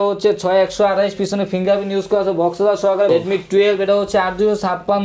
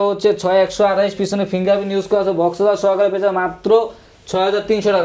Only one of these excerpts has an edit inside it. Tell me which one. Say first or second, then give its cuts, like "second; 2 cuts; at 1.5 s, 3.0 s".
first; 1 cut; at 3.1 s